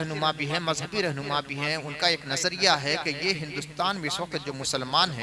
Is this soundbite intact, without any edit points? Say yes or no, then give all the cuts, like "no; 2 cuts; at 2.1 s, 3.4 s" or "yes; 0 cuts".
yes; 0 cuts